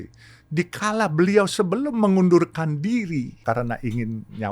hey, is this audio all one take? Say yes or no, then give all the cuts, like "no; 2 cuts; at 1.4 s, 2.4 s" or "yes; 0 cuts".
no; 1 cut; at 3.4 s